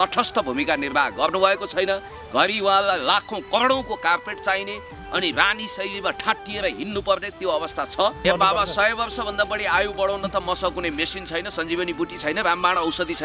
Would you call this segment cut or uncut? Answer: cut